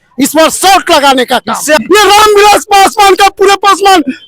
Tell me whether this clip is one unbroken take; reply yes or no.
no